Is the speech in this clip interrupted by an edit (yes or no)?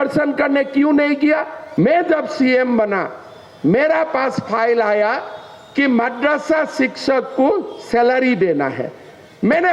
yes